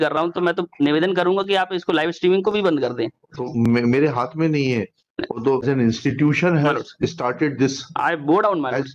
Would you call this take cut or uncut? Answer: cut